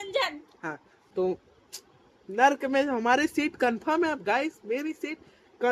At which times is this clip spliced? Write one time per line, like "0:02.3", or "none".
0:01.0